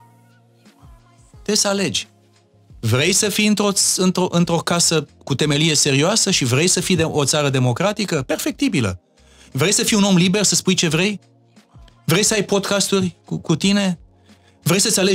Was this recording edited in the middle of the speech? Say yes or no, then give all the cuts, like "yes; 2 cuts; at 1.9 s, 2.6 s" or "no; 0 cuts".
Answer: no; 0 cuts